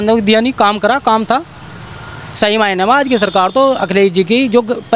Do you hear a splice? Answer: no; 0 cuts

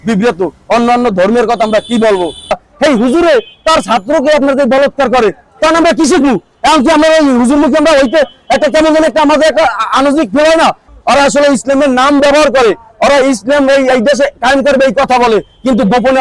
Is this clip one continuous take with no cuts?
no; 2 cuts; at 2.7 s, 10.9 s

